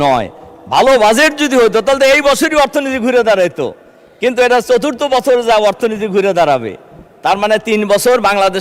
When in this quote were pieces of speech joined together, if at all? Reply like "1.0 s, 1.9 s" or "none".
none